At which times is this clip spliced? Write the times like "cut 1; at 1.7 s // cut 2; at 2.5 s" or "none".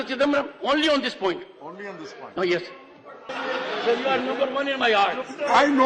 cut 1; at 3.3 s